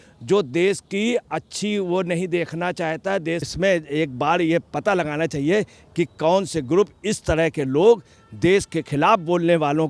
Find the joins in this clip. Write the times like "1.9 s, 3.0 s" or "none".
3.5 s